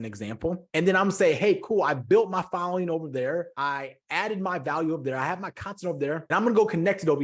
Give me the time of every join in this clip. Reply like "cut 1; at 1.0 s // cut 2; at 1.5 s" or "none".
cut 1; at 3.5 s // cut 2; at 6.2 s